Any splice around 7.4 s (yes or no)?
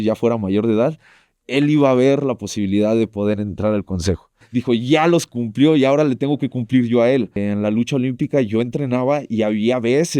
yes